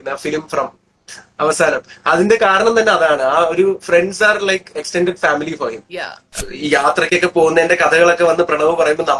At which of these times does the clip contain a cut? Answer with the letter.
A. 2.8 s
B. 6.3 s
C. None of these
B